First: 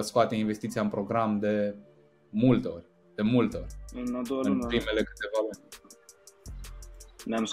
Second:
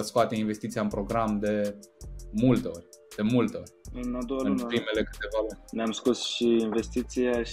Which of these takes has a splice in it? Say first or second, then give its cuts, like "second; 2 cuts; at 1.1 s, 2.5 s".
second; 1 cut; at 5.6 s